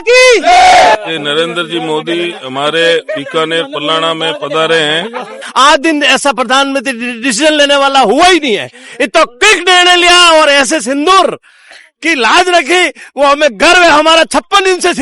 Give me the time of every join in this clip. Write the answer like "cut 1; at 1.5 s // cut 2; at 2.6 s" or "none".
cut 1; at 1.0 s // cut 2; at 5.4 s